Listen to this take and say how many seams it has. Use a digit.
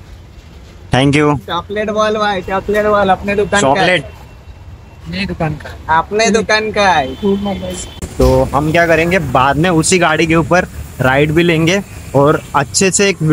1